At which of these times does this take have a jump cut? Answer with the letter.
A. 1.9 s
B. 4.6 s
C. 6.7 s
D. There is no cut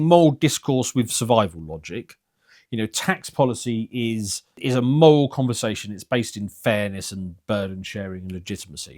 B